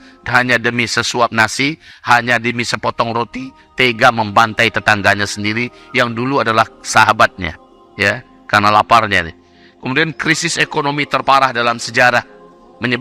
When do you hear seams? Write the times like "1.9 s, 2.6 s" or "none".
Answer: none